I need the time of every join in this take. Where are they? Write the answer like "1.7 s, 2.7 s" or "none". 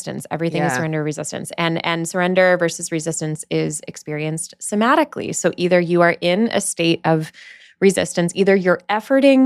none